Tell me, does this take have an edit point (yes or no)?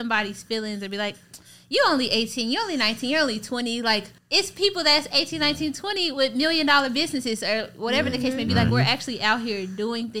yes